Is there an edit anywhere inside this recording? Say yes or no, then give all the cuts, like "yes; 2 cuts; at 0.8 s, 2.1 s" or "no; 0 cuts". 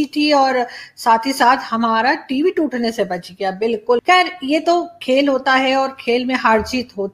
no; 0 cuts